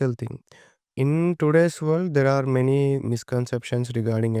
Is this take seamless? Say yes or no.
no